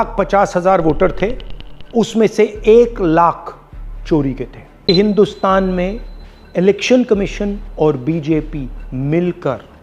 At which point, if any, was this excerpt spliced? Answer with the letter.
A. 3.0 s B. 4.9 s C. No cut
B